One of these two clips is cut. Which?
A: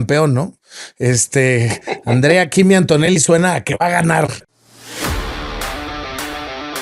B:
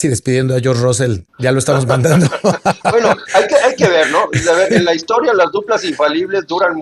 A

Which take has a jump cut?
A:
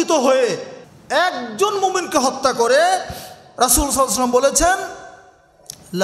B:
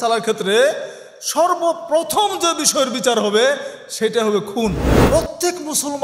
B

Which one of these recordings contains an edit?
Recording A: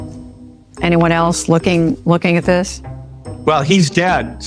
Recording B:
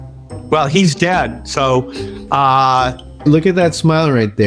B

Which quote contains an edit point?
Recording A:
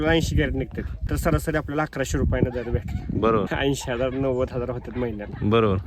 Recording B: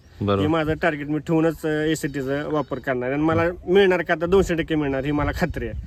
A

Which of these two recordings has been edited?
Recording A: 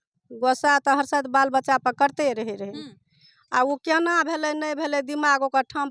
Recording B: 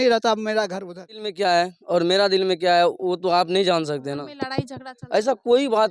B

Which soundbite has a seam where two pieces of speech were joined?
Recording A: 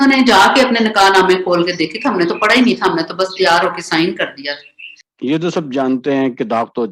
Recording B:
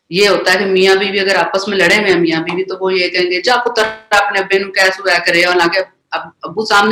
A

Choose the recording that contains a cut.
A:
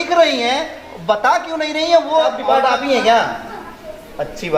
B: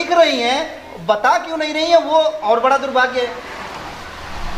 A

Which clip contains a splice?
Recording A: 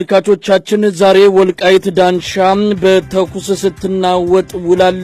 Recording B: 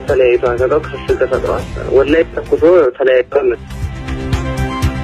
B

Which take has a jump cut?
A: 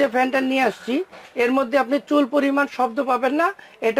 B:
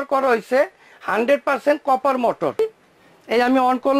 B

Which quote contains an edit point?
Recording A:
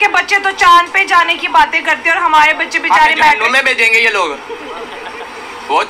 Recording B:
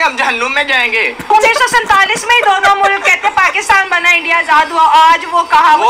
B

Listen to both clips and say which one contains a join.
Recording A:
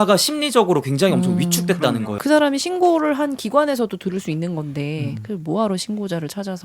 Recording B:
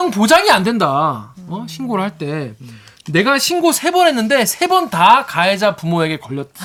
A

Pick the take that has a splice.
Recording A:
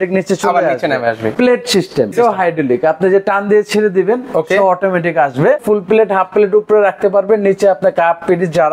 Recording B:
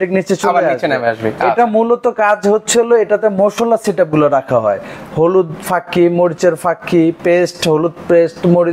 A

